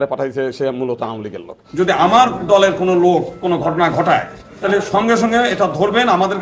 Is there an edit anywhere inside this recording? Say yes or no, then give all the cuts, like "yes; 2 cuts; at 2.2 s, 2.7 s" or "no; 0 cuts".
yes; 1 cut; at 1.6 s